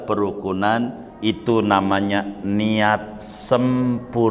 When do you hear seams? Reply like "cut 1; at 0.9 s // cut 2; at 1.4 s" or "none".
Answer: cut 1; at 1.1 s

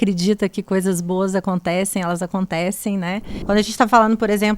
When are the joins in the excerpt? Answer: cut 1; at 3.3 s

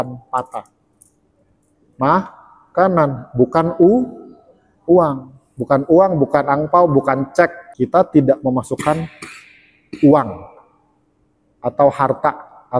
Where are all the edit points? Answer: cut 1; at 7.6 s

